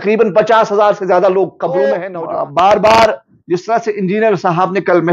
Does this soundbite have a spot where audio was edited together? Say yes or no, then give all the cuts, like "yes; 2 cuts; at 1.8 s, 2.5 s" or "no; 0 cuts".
yes; 1 cut; at 2.0 s